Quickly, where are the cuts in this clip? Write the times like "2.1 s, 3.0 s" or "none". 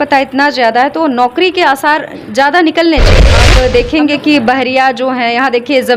3.4 s